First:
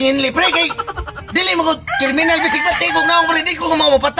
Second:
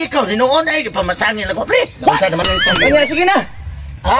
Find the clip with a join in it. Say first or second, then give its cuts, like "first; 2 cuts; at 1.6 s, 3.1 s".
second; 1 cut; at 2.4 s